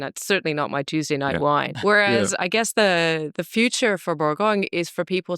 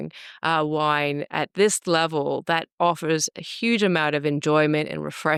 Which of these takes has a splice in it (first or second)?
first